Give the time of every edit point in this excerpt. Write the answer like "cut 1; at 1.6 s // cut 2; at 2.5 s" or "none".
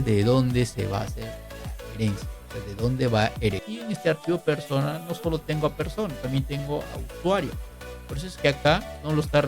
cut 1; at 3.6 s